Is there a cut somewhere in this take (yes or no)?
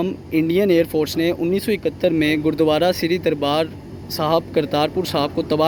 no